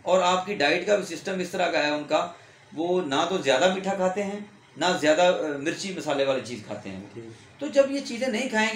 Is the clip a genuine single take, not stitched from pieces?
yes; 0 cuts

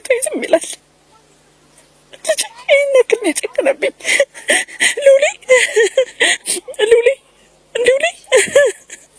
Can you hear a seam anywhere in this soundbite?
no; 0 cuts

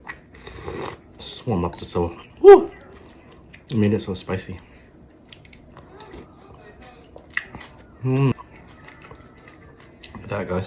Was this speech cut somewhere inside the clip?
no; 0 cuts

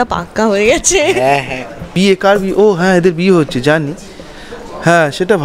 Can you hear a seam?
yes; 1 cut; at 1.9 s

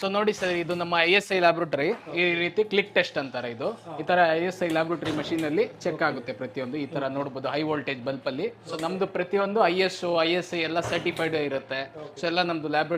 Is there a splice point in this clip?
yes; 2 cuts; at 2.1 s, 8.6 s

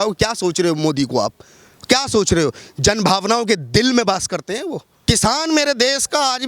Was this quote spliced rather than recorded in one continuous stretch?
yes; 1 cut; at 4.9 s

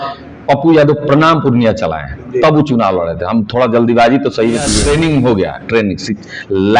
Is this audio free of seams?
no; 1 cut; at 4.8 s

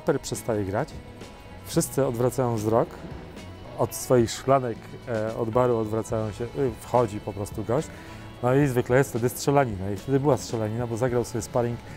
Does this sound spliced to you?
no; 0 cuts

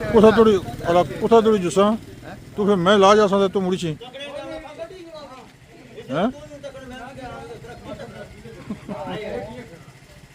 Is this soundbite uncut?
yes; 0 cuts

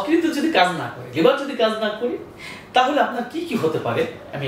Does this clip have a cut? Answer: no; 0 cuts

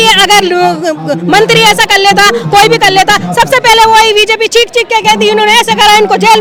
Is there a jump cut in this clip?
no; 0 cuts

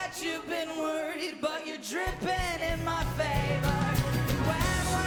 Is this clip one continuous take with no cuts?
yes; 0 cuts

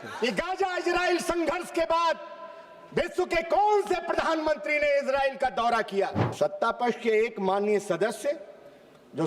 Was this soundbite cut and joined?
yes; 1 cut; at 6.2 s

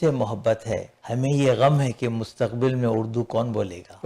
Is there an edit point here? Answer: yes; 1 cut; at 0.9 s

